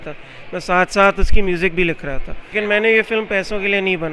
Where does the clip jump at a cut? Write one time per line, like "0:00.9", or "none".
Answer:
0:02.4